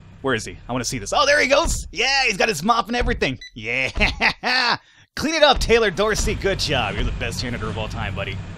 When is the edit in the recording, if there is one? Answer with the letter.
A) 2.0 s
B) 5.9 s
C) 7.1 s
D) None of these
D